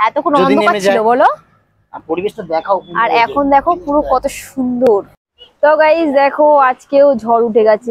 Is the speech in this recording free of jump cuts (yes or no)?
no